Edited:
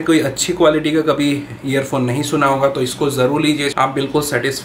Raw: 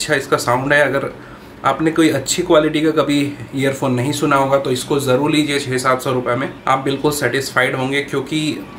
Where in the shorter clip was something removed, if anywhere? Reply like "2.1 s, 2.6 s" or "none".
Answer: 3.7 s